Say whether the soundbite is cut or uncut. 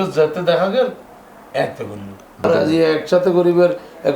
cut